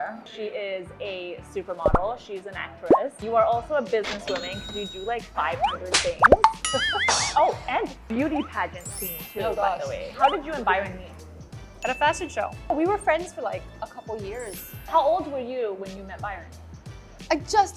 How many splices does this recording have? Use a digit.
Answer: 3